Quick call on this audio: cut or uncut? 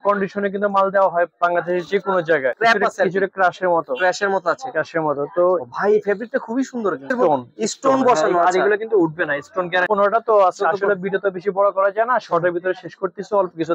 cut